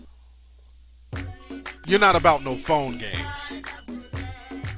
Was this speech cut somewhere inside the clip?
no; 0 cuts

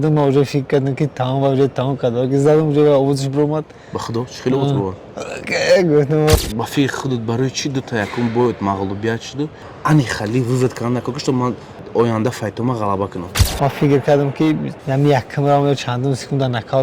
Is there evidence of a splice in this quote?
yes; 4 cuts; at 6.3 s, 9.6 s, 13.4 s, 14.7 s

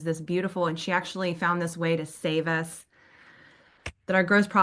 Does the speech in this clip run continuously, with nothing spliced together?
yes; 0 cuts

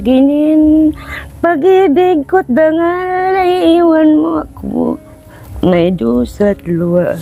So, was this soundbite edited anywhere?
no; 0 cuts

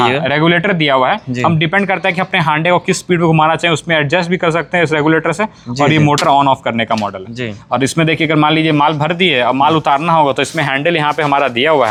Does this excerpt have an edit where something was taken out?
no; 0 cuts

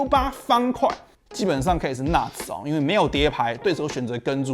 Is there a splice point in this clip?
yes; 2 cuts; at 1.1 s, 3.6 s

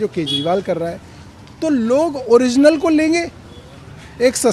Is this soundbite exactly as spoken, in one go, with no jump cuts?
yes; 0 cuts

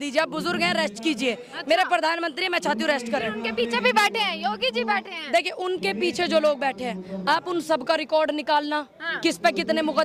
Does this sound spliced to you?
no; 0 cuts

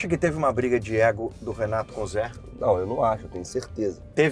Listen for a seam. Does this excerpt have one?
no; 0 cuts

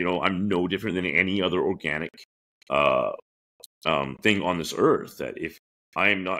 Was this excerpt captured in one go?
yes; 0 cuts

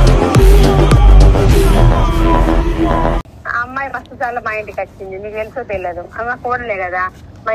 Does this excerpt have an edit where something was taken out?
yes; 1 cut; at 3.3 s

